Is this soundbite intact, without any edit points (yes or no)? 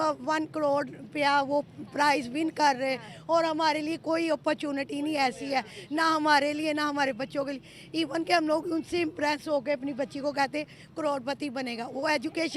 yes